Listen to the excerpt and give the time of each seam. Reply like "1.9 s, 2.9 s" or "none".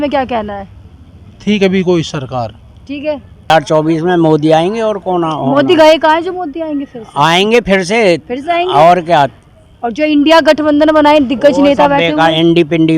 3.5 s

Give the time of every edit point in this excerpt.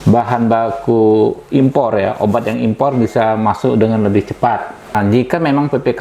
5.0 s

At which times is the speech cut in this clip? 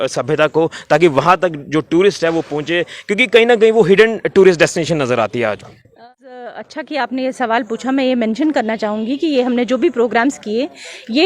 5.9 s

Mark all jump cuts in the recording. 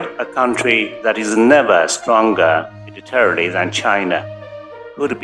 none

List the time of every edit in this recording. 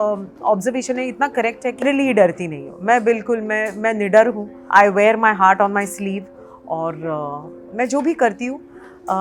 1.8 s, 4.5 s

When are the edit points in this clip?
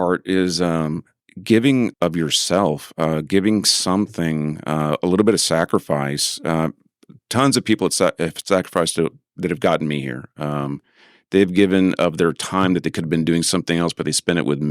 1.1 s, 1.9 s

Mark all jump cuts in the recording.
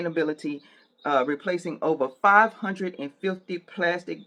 none

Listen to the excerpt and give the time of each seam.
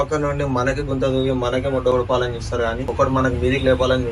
2.9 s

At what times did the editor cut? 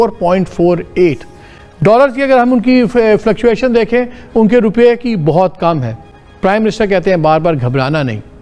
none

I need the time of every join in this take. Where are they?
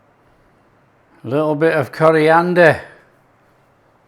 none

